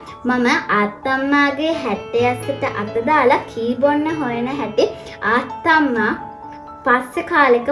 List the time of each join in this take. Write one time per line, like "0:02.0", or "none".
none

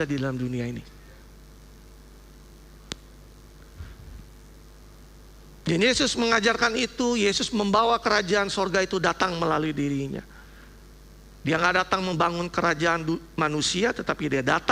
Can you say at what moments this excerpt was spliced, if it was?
none

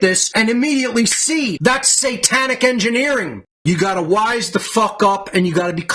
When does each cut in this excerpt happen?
0:03.4

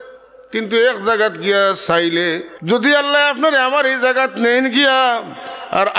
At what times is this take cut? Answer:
0:02.5

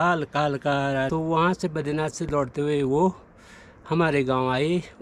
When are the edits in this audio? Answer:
0:01.1

